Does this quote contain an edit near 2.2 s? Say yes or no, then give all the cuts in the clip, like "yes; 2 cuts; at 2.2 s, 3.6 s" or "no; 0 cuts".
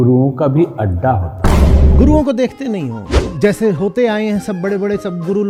no; 0 cuts